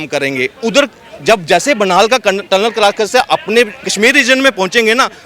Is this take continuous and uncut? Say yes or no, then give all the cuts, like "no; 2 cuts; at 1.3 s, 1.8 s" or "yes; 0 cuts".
no; 1 cut; at 3.8 s